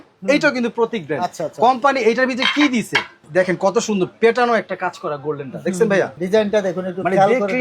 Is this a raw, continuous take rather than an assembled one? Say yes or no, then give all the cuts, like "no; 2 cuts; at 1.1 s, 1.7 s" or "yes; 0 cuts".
no; 2 cuts; at 3.2 s, 6.2 s